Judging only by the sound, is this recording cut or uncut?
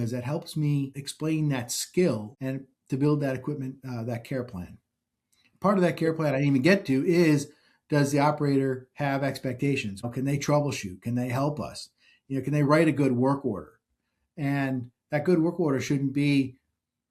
uncut